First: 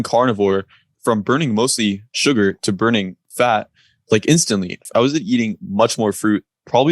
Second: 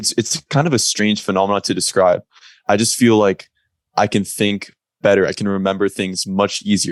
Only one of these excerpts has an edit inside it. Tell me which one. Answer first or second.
first